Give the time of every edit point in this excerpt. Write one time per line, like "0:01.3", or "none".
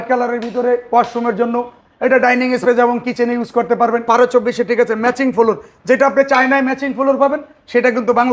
0:04.0